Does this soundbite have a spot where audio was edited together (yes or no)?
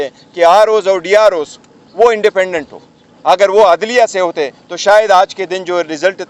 no